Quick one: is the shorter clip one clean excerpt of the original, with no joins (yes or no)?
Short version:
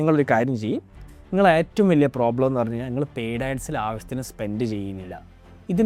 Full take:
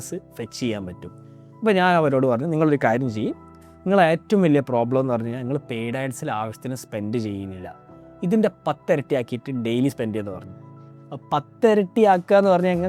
yes